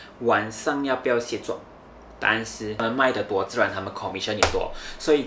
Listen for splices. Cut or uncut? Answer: cut